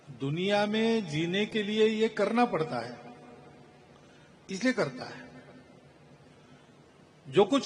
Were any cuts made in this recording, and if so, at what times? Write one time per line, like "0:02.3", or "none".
none